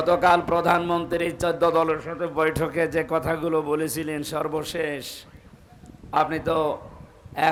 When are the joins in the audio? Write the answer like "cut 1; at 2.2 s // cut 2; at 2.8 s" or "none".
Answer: none